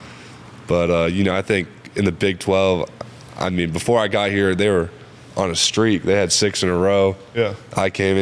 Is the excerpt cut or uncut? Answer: uncut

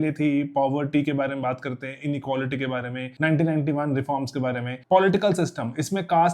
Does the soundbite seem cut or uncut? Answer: cut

